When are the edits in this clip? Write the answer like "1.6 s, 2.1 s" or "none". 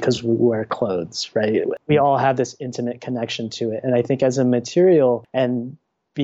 1.7 s, 5.2 s